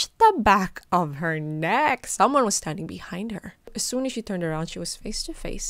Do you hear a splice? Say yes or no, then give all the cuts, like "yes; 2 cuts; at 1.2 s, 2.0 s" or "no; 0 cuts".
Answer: yes; 1 cut; at 3.7 s